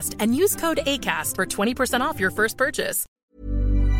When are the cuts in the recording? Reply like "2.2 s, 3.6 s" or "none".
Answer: 3.0 s